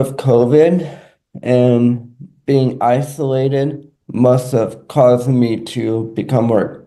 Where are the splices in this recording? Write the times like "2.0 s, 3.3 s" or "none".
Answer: none